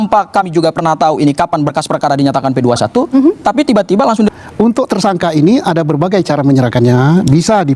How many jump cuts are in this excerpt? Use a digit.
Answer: 1